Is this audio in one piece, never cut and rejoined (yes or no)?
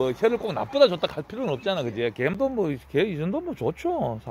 no